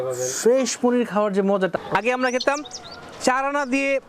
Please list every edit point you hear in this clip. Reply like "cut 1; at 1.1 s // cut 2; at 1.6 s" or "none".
cut 1; at 1.7 s